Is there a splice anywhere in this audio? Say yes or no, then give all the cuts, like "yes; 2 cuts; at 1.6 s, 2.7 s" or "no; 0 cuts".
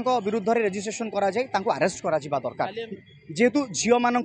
no; 0 cuts